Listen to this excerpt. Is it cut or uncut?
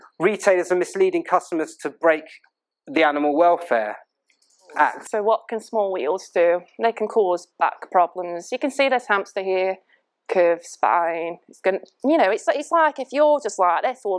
cut